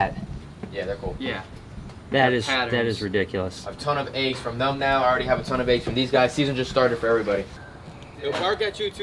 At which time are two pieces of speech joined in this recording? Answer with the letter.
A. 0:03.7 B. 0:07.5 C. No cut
C